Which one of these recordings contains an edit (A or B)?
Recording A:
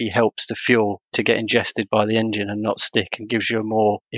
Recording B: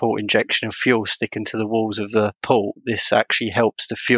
B